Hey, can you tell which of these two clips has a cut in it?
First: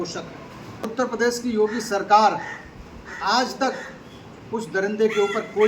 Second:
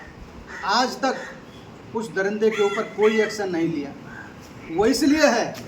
first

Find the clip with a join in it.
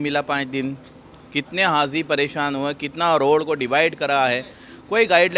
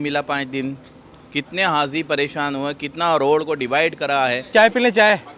second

